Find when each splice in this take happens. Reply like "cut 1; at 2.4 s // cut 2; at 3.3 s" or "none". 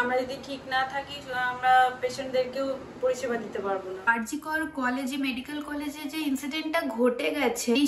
cut 1; at 4.1 s